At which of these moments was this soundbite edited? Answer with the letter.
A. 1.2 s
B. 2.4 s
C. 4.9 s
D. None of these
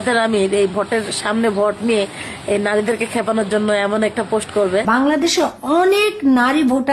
C